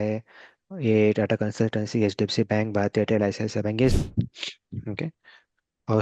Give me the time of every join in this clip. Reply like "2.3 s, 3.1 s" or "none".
3.9 s

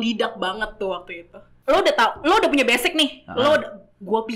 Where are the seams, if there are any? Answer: 1.5 s

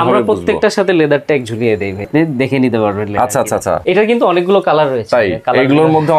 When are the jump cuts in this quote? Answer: 2.1 s, 3.8 s

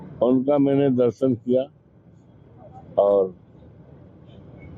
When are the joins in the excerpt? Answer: 1.2 s

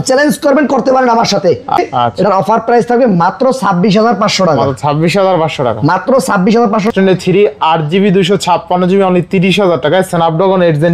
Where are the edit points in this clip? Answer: 1.8 s, 6.9 s

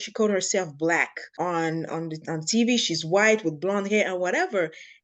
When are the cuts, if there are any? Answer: 1.2 s

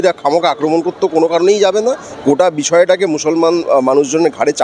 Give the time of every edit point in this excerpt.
2.1 s

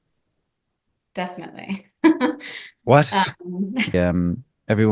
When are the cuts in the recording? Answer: 3.9 s

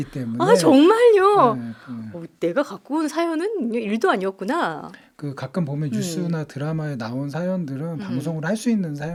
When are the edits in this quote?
none

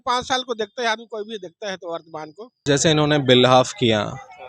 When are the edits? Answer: 2.5 s

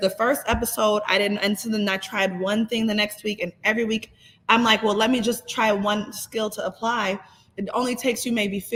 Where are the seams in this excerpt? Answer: none

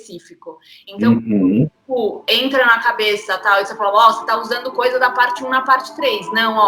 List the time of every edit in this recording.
none

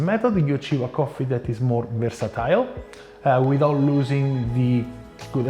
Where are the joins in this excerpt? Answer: none

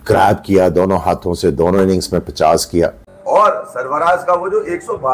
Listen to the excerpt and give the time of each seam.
3.1 s

